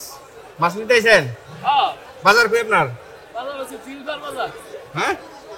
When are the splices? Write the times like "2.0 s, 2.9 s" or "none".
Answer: none